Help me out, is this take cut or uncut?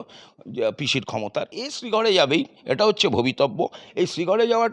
cut